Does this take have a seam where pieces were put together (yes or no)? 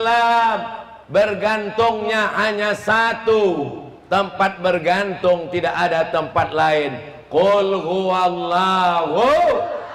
no